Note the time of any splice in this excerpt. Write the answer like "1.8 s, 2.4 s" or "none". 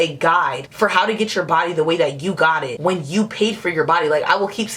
none